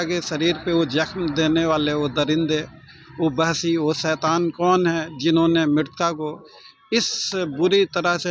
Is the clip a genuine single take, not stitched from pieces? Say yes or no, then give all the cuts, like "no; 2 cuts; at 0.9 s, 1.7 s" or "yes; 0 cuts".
yes; 0 cuts